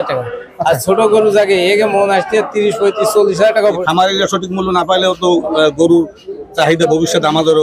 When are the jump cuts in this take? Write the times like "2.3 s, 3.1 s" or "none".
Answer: 3.8 s